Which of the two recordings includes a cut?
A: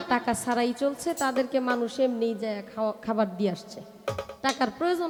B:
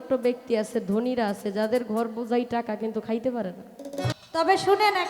B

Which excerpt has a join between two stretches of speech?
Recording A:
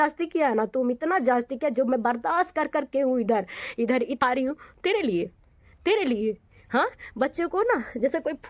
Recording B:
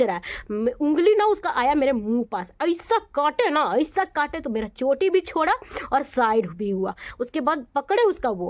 A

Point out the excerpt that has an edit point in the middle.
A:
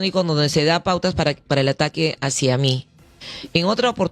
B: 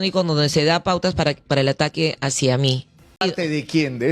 B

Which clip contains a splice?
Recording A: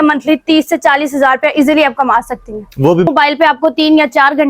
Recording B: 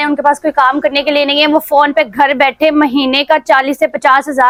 A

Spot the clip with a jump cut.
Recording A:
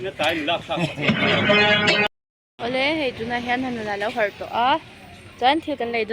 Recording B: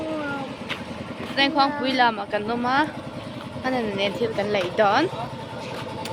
A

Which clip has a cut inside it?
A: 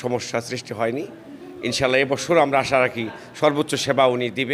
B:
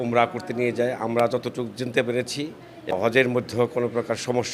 B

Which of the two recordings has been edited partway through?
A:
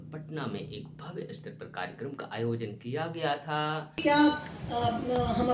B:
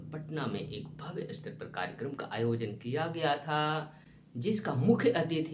A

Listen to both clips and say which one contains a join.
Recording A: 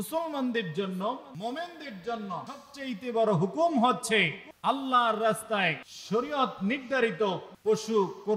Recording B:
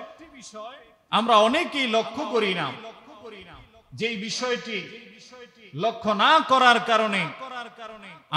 A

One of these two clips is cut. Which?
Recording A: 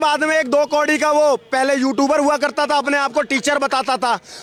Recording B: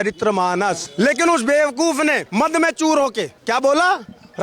B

